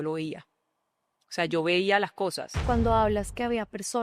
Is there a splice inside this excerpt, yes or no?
yes